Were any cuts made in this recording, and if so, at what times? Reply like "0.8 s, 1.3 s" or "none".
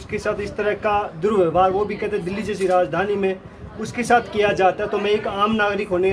none